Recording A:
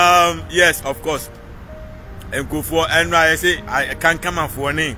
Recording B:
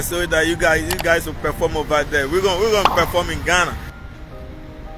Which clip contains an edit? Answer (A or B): B